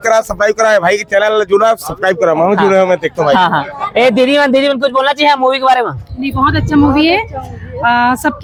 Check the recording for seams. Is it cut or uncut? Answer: uncut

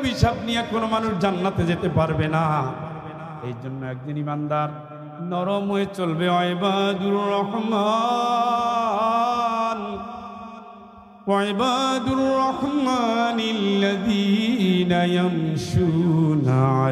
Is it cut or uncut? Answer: uncut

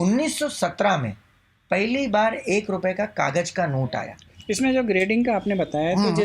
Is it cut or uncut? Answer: cut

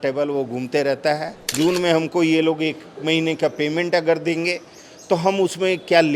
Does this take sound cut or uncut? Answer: cut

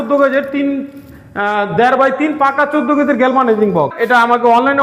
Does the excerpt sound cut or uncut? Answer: cut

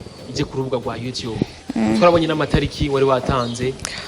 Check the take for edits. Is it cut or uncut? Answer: uncut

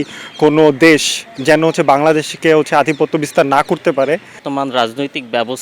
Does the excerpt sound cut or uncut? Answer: cut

